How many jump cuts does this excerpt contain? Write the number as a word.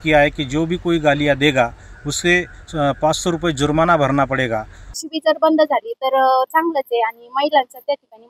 one